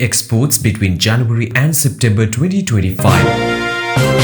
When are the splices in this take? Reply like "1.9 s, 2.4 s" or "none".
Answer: 3.1 s